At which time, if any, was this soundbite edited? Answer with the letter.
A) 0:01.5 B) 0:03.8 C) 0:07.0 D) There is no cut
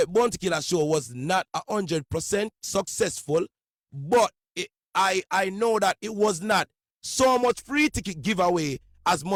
D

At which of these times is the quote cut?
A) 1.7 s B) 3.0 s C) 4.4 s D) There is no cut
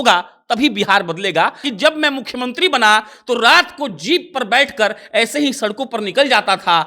A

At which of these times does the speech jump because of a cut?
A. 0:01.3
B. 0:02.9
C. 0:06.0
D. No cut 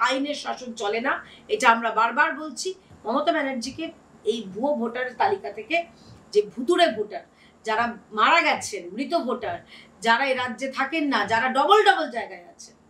B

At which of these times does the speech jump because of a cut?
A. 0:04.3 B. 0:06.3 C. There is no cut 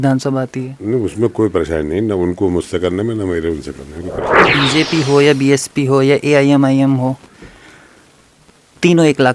A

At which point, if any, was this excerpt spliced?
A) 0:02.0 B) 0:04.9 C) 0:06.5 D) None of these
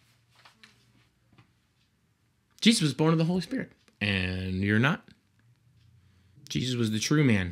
C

